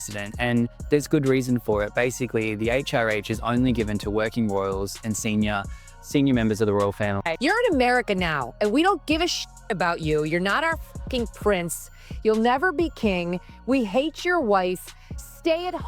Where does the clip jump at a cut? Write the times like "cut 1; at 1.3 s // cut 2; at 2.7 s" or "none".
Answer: cut 1; at 7.3 s

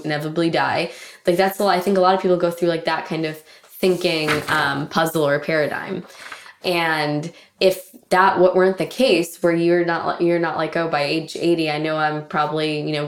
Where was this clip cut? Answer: none

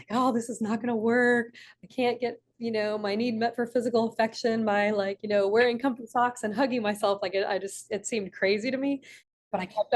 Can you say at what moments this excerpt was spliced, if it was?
none

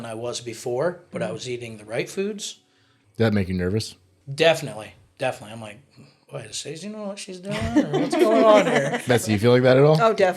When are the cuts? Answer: cut 1; at 9.0 s

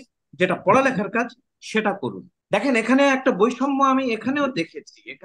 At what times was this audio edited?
cut 1; at 2.3 s

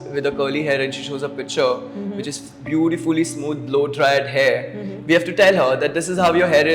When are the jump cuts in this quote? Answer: cut 1; at 4.9 s

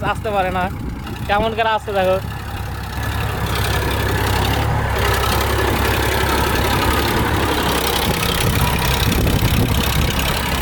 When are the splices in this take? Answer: none

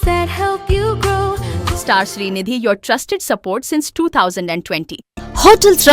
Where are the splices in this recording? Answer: cut 1; at 1.5 s // cut 2; at 5.0 s

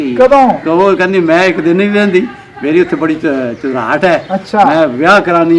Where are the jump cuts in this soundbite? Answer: none

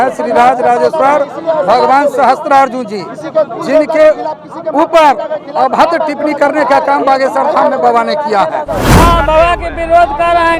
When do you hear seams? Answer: cut 1; at 8.8 s

